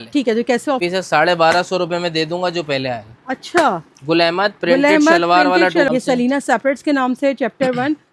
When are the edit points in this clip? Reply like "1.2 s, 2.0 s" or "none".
0.8 s, 5.9 s